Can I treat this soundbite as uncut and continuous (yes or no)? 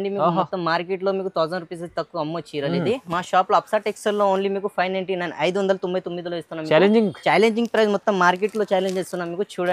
yes